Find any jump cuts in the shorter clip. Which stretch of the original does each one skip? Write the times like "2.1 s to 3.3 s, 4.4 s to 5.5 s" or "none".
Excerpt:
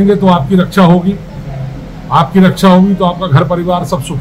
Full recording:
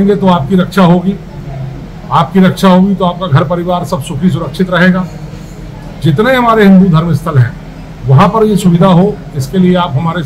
none

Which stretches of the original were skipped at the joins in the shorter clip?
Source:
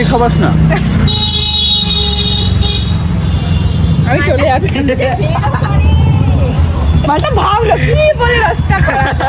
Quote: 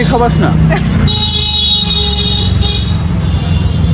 none

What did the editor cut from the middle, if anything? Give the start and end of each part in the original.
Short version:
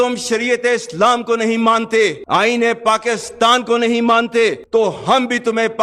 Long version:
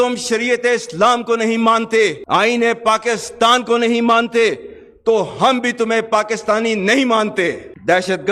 4.6 s to 4.9 s

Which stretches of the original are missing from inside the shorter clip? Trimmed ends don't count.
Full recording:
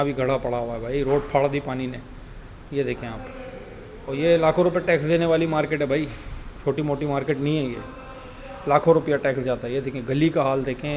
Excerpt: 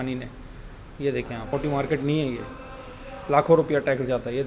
3.2 s to 6.9 s

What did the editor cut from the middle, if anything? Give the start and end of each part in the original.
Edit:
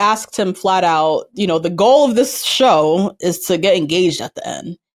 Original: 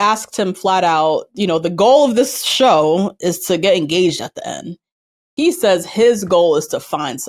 none

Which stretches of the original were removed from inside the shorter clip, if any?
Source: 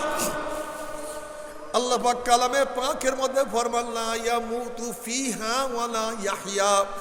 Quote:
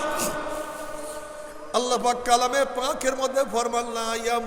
none

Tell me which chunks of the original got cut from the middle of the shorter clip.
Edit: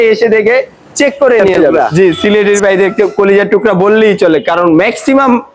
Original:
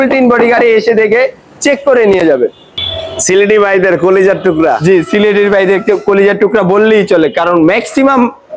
2.4 s to 4.6 s

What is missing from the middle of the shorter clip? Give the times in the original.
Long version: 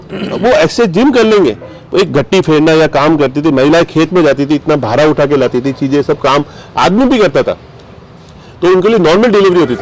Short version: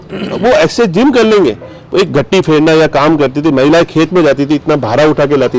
none

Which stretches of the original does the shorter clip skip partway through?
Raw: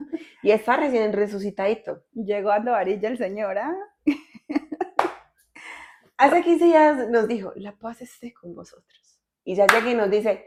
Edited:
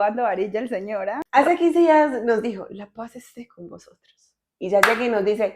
3.7 s to 6.1 s

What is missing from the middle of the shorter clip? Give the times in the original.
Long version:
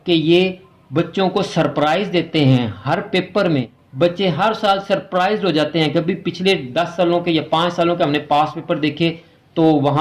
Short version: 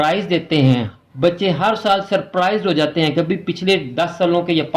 2.8 s to 3.7 s

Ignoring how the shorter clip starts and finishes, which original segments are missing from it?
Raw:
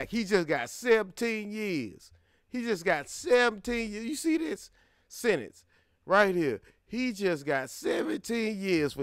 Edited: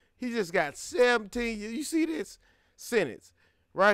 none

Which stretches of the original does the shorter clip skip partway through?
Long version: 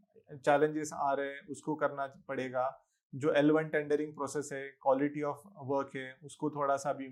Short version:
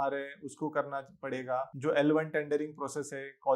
2.8 s to 3.1 s

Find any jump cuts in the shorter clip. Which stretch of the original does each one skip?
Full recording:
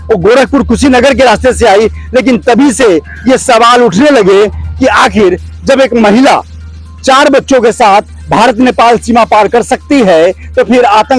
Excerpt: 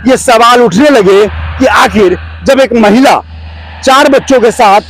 none

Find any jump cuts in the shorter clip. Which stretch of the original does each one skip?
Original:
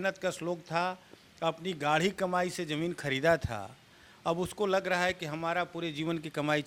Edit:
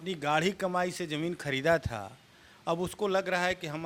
none

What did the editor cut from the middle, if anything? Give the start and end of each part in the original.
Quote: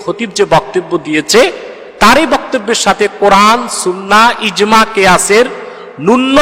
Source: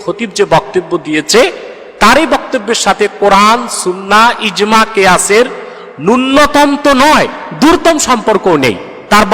none

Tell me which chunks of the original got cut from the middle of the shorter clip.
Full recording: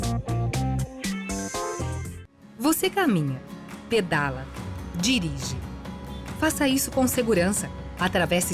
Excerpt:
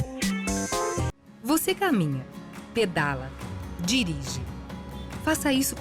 2.1 s to 2.4 s

